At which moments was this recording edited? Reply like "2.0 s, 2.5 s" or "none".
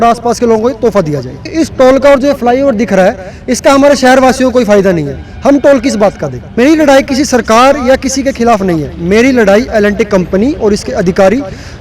1.5 s, 6.4 s